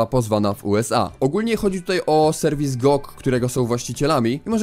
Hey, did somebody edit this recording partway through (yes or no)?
yes